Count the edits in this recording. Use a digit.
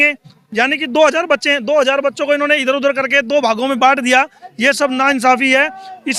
0